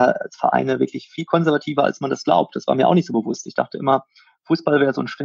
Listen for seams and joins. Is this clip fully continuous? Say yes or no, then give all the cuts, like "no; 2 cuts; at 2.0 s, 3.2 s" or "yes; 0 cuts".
yes; 0 cuts